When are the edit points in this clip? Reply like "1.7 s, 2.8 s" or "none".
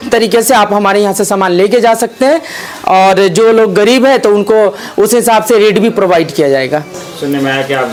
none